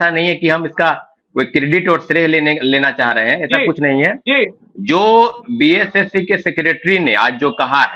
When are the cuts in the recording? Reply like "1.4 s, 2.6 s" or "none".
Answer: none